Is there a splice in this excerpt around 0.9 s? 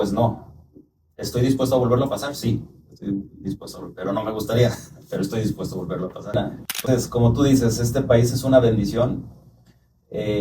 no; 1 cut; at 6.3 s

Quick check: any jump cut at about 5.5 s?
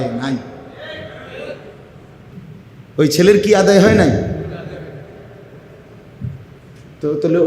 no; 1 cut; at 2.2 s

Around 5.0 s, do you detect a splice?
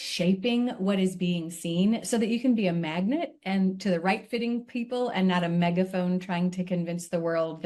no; 0 cuts

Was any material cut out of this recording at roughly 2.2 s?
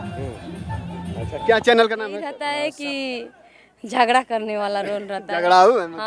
yes; 1 cut; at 2.2 s

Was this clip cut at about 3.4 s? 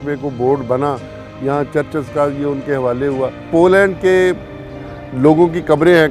yes; 1 cut; at 3.4 s

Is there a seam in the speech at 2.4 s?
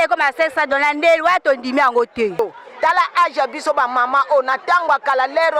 yes; 1 cut; at 2.4 s

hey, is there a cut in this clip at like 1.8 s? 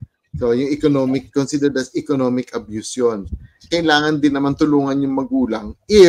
no; 1 cut; at 3.7 s

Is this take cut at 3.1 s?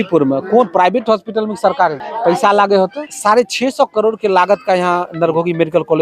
yes; 2 cuts; at 2.1 s, 3.1 s

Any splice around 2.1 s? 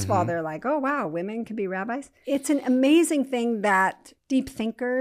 yes; 2 cuts; at 2.1 s, 4.1 s

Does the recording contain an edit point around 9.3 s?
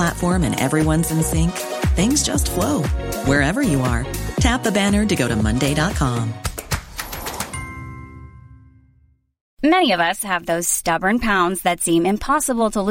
yes; 1 cut; at 9.3 s

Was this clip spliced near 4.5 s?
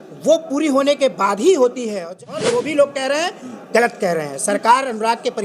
no; 1 cut; at 2.4 s

